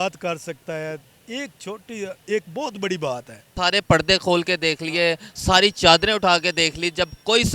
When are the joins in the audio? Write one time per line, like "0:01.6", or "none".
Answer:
0:03.5